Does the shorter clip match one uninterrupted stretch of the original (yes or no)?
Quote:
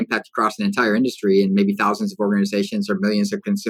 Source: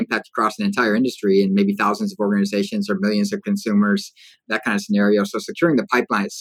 yes